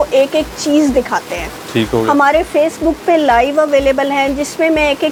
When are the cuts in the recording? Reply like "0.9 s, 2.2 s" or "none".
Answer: none